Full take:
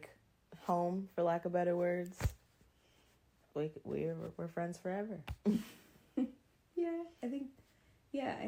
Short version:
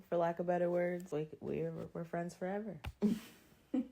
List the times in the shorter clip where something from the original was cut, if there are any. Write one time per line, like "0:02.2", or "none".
0:01.1